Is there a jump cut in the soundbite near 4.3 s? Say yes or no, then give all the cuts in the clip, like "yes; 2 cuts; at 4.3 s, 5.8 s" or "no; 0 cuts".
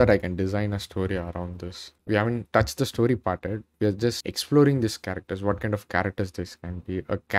yes; 1 cut; at 4.3 s